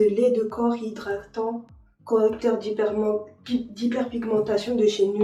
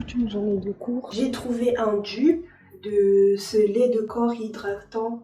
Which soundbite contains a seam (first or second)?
second